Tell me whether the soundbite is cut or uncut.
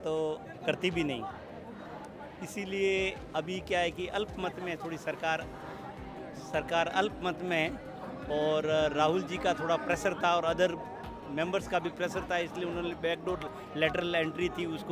uncut